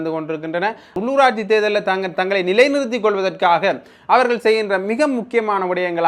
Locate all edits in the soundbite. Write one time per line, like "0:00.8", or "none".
0:01.0